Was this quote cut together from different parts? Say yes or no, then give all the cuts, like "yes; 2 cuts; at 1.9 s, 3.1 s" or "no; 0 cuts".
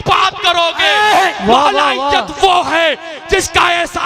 no; 0 cuts